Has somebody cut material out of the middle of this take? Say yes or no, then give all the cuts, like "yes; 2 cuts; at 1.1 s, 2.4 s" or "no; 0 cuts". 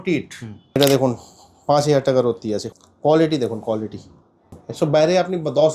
yes; 3 cuts; at 0.8 s, 2.6 s, 4.6 s